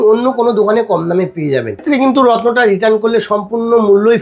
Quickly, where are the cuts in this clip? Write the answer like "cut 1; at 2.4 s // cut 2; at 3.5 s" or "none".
cut 1; at 1.8 s